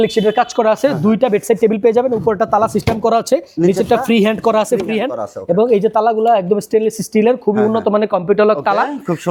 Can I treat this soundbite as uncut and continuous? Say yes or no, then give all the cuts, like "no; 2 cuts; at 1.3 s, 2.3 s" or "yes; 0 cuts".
yes; 0 cuts